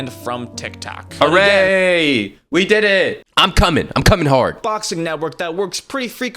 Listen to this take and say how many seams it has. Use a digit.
2